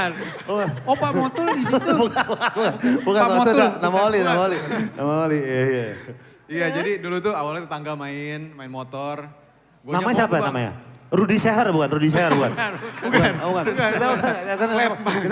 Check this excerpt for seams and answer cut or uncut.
uncut